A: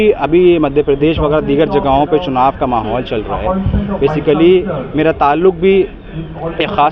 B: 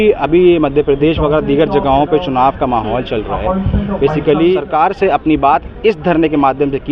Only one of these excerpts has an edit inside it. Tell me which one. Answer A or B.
B